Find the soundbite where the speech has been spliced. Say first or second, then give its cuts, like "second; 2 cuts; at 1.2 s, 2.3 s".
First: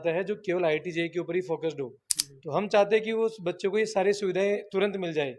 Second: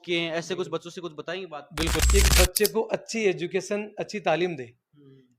second; 1 cut; at 2.1 s